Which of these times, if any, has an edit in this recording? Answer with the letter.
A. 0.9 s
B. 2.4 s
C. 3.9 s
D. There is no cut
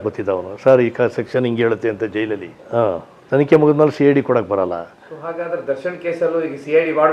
B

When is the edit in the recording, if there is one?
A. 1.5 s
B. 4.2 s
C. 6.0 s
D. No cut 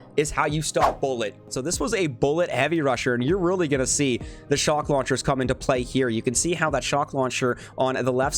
A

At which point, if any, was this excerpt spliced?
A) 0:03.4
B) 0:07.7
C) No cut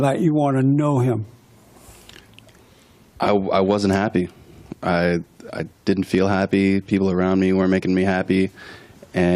B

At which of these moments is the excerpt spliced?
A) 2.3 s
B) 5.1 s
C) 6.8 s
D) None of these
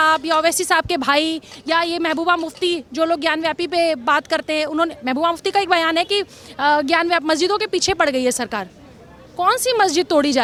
D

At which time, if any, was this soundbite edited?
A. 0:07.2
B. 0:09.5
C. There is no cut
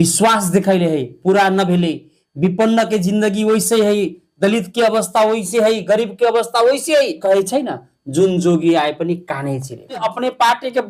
A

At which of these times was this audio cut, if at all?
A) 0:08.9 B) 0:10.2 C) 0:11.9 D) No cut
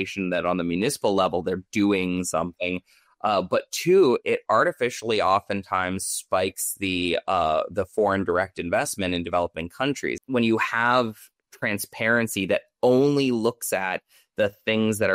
B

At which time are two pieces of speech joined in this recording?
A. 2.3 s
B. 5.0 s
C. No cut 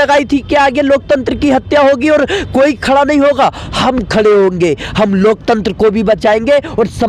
C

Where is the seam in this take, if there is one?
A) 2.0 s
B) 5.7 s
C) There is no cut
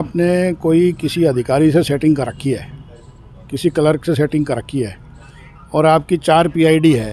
C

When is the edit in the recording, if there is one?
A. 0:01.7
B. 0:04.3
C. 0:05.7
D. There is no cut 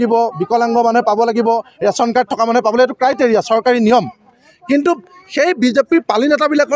D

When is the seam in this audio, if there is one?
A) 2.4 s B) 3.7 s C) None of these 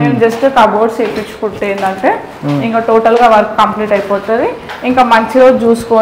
C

